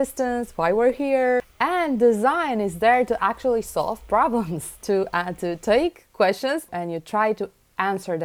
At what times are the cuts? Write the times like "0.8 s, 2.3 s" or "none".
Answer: 1.5 s, 6.7 s